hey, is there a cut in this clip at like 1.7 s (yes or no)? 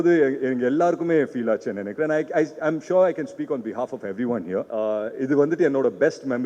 no